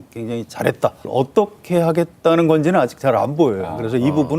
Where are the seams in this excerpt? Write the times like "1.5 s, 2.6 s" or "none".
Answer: 1.1 s